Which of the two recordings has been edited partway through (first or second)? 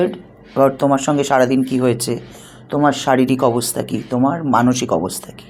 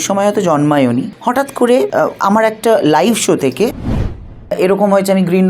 second